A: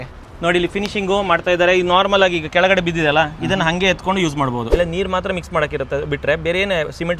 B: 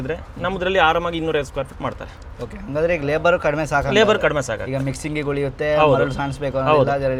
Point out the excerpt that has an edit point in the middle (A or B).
A